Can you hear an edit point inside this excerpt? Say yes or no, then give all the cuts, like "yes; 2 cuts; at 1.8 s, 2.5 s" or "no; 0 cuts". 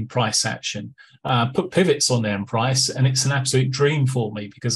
no; 0 cuts